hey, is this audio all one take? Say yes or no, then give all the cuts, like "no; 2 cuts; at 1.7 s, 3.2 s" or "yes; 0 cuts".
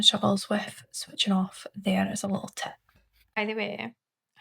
no; 1 cut; at 3.4 s